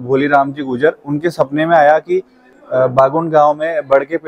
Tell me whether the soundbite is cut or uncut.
uncut